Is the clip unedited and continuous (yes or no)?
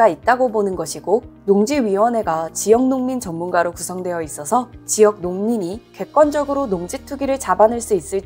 yes